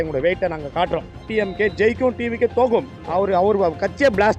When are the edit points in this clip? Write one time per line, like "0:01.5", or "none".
0:01.3
0:03.0